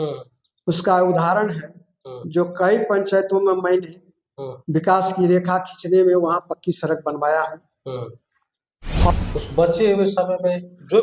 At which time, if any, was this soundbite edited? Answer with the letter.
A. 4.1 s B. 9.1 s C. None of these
B